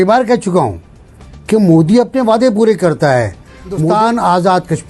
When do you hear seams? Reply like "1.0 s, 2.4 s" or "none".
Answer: 3.8 s